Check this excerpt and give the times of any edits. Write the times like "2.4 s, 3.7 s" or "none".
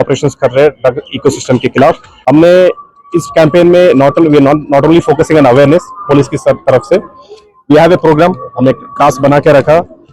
2.1 s